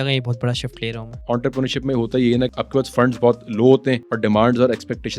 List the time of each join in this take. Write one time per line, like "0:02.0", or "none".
0:01.2
0:04.1